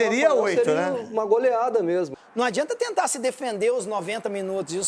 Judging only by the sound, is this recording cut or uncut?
cut